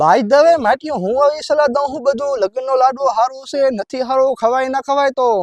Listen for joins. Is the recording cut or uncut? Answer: uncut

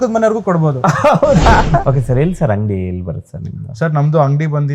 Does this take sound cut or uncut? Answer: cut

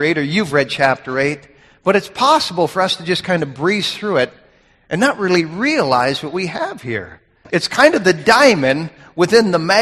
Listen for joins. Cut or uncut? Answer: cut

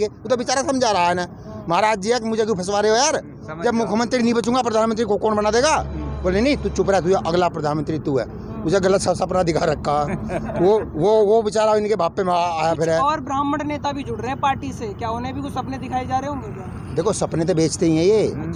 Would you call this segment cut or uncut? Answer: uncut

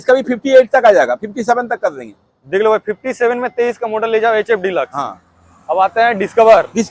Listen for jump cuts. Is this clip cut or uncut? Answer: uncut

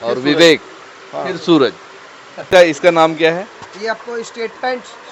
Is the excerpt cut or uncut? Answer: cut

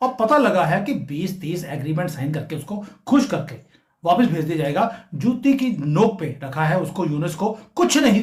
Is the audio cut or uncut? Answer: uncut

